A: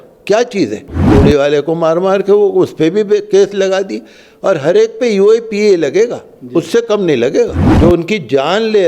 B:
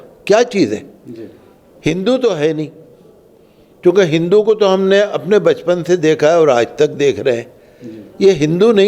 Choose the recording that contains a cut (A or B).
A